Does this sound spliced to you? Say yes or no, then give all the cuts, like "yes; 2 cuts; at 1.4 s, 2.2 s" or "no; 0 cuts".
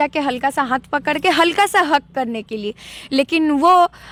no; 0 cuts